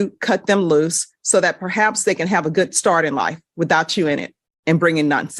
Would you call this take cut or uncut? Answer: uncut